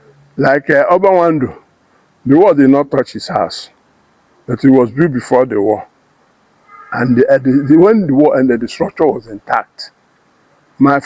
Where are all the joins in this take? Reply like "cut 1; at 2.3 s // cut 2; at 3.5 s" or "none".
none